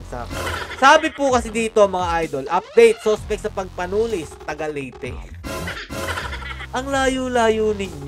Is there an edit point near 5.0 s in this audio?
no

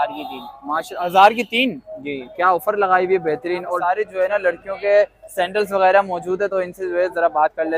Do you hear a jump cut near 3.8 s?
yes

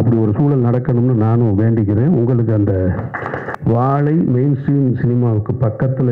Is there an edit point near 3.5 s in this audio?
yes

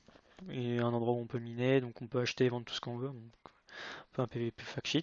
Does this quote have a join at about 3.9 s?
no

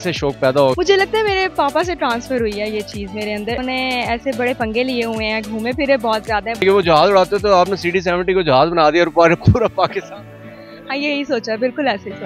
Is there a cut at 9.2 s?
no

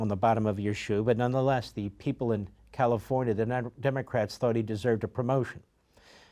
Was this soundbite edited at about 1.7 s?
no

